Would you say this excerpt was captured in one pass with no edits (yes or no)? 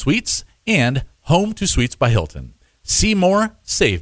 yes